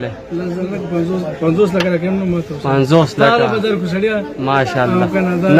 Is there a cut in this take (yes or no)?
no